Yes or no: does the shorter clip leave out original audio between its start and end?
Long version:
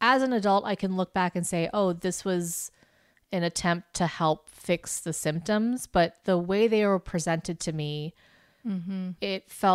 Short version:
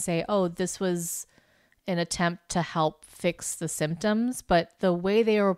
no